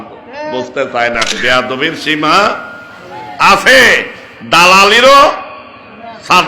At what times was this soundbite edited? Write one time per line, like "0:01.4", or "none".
0:01.3